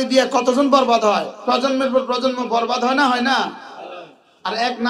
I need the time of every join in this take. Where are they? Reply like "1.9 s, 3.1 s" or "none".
1.3 s